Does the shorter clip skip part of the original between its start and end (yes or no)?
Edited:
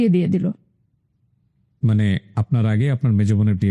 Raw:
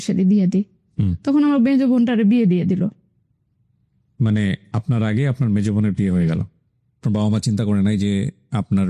no